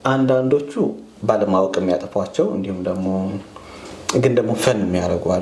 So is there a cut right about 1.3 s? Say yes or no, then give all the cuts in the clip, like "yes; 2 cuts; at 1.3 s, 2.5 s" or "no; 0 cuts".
no; 0 cuts